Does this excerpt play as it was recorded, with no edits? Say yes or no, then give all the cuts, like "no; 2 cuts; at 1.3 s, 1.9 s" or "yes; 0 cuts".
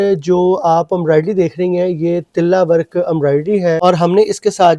no; 1 cut; at 3.8 s